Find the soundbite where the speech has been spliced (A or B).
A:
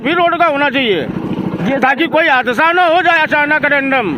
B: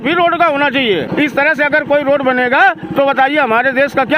B